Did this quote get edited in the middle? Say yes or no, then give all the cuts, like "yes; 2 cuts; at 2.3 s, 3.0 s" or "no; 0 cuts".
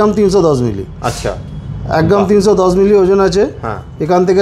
no; 0 cuts